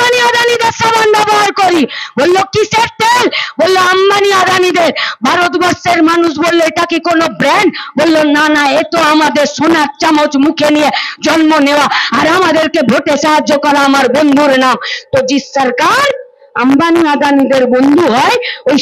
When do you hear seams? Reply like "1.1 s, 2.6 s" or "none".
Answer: none